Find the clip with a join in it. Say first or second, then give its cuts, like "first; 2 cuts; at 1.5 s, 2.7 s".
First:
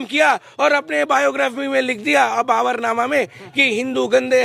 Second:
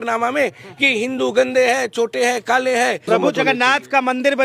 second; 1 cut; at 3.1 s